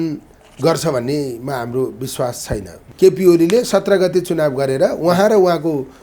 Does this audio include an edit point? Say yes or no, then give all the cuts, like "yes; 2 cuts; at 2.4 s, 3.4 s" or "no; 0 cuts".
yes; 1 cut; at 2.8 s